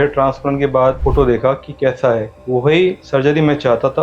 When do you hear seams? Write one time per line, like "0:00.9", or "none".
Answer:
0:01.0
0:02.3